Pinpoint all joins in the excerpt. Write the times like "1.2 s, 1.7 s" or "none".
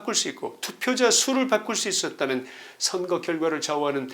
none